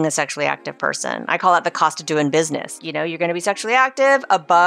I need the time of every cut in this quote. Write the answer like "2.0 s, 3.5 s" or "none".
2.8 s

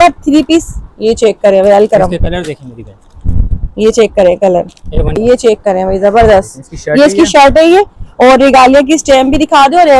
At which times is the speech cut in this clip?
5.2 s

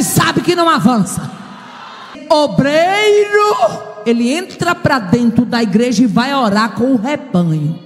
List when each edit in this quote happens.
2.2 s

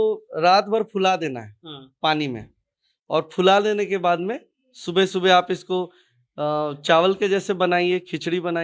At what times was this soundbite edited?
none

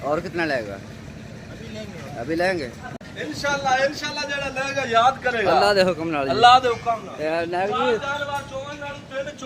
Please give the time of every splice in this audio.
2.8 s

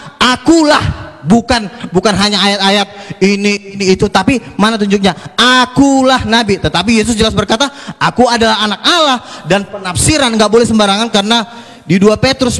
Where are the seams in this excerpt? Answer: none

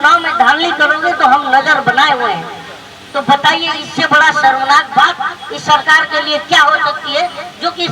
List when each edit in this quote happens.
none

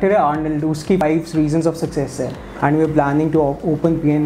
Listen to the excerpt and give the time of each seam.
1.0 s, 2.4 s

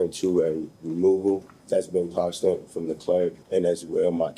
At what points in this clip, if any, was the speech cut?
1.5 s, 3.4 s

